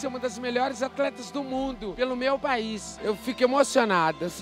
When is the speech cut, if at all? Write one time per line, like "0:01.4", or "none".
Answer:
0:02.9